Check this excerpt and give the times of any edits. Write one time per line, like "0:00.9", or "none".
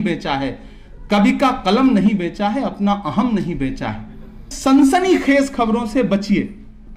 0:04.5